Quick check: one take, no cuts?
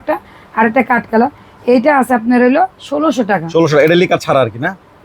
yes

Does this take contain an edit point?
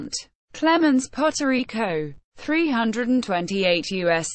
yes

